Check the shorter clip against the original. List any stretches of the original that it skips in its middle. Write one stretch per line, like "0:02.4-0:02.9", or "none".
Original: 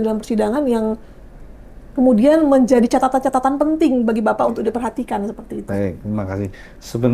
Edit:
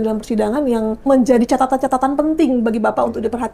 0:01.1-0:02.5